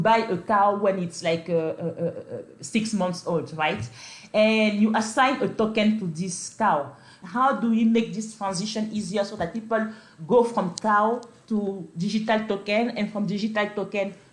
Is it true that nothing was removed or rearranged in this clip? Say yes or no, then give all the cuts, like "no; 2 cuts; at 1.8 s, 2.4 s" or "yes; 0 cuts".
no; 1 cut; at 7.2 s